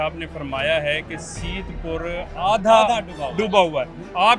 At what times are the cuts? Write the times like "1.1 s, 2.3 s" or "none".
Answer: none